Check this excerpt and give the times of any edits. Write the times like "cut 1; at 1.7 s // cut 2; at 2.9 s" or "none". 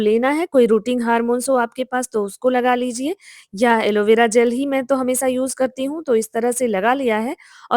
none